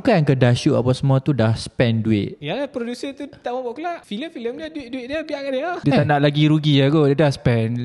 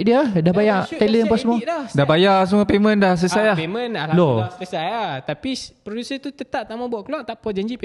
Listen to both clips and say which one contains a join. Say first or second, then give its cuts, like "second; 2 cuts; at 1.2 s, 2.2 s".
first; 3 cuts; at 2.4 s, 4.0 s, 5.8 s